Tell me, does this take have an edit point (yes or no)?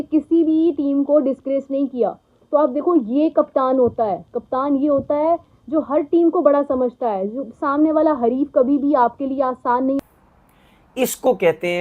yes